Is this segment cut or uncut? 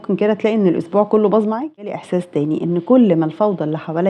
cut